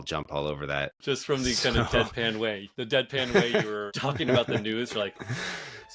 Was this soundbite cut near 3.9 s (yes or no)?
yes